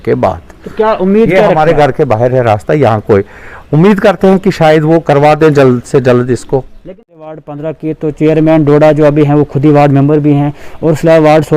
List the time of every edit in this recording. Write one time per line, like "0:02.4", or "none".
0:07.4